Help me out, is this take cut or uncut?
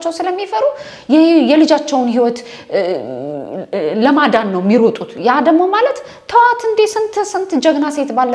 uncut